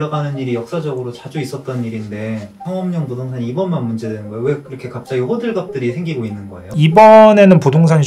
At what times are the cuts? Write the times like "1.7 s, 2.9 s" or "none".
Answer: 2.6 s, 6.7 s